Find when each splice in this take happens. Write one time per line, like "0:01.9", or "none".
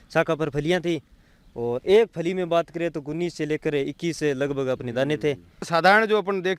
0:05.7